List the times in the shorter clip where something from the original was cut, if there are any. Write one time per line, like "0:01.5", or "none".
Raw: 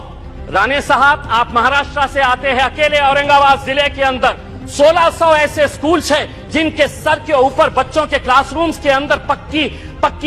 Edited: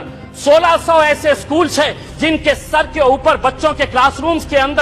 none